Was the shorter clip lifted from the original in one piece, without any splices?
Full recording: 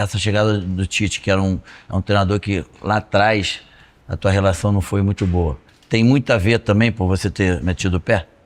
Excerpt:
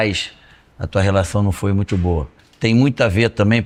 yes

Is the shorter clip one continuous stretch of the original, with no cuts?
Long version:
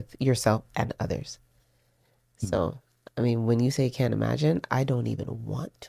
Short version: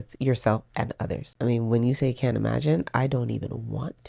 no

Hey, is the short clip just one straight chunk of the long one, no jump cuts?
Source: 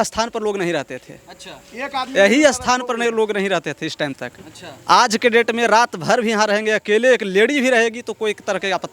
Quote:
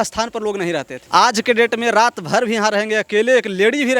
no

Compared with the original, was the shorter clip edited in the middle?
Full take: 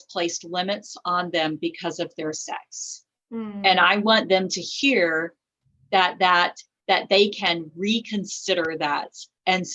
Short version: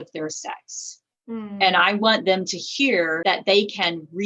yes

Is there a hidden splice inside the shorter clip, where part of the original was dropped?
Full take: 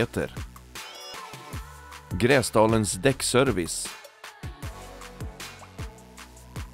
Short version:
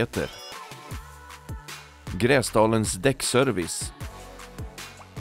yes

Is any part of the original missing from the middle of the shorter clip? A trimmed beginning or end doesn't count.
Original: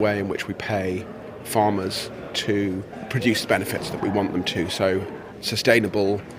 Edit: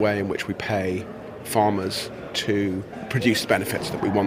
no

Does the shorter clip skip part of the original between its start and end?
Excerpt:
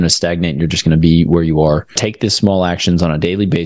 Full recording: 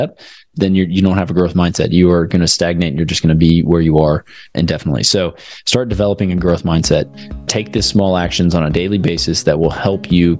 yes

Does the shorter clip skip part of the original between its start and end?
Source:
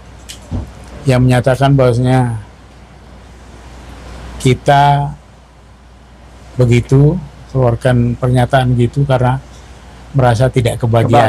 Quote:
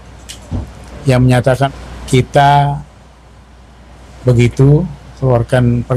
yes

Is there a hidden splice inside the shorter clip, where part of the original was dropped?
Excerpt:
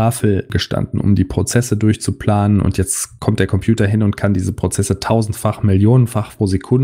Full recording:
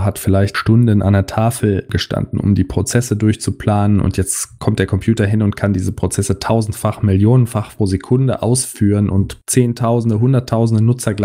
no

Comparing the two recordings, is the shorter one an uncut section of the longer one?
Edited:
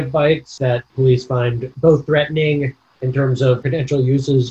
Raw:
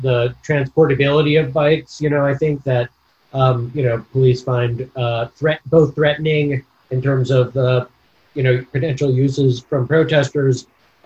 no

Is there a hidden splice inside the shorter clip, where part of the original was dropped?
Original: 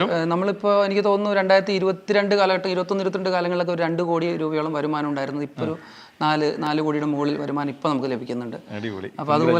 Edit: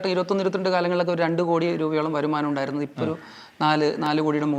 no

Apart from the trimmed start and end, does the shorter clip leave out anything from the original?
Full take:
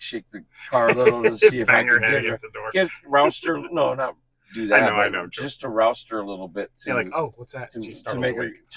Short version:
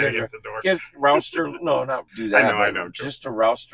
yes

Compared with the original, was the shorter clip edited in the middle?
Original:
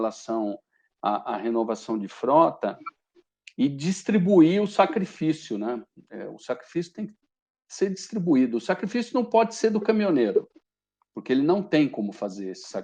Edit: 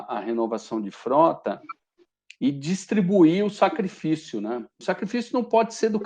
yes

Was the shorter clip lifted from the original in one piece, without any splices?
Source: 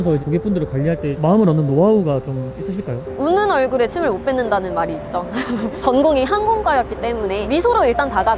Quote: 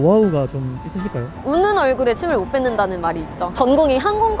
no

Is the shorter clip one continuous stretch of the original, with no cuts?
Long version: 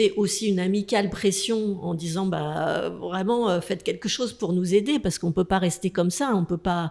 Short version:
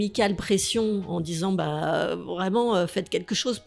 yes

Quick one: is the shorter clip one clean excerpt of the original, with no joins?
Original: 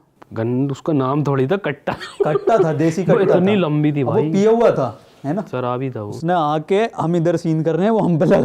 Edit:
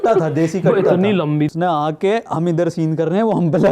no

